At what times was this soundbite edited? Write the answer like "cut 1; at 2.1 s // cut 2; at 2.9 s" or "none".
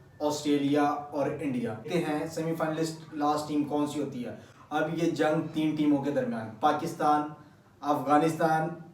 none